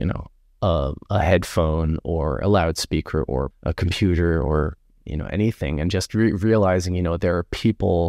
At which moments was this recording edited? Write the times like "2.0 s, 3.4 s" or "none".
3.6 s